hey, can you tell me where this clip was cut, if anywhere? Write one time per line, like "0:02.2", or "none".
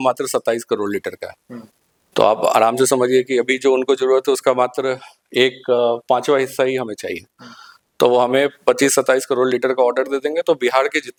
none